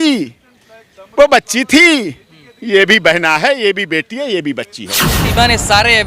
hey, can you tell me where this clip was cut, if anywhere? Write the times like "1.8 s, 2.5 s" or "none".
5.1 s